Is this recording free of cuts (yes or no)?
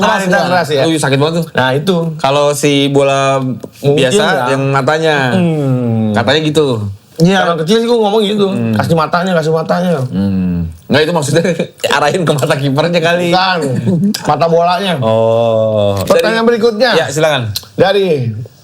no